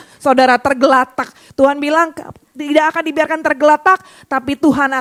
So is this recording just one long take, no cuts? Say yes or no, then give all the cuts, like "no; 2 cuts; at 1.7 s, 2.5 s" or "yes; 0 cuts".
yes; 0 cuts